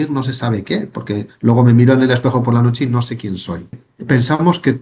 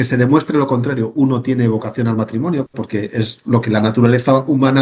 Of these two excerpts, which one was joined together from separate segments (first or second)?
first